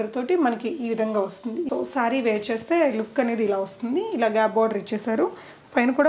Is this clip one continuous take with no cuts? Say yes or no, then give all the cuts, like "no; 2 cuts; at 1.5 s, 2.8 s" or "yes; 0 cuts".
no; 1 cut; at 1.7 s